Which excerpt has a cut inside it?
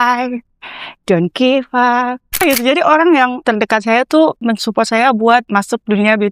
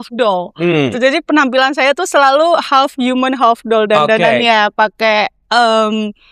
first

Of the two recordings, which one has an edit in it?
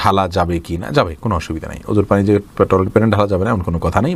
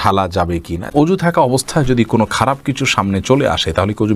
second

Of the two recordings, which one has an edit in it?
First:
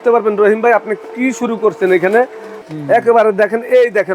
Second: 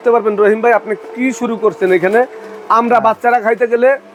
first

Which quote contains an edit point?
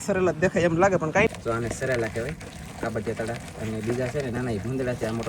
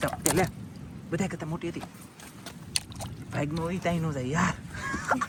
first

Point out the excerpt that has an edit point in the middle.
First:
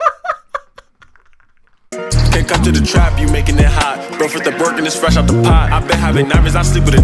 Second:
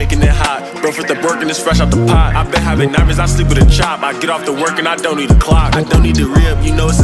first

